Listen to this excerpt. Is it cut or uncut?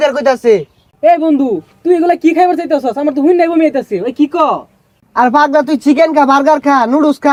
uncut